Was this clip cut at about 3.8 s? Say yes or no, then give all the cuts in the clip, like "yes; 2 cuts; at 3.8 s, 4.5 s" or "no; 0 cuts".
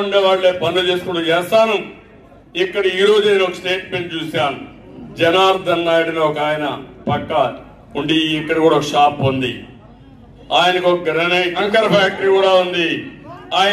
no; 1 cut; at 11.6 s